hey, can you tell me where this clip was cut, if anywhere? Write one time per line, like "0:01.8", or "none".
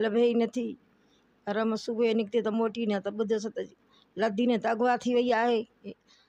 none